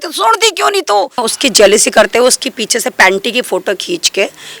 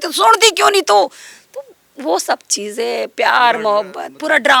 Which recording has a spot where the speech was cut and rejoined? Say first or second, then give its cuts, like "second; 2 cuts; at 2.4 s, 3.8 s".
first; 1 cut; at 1.3 s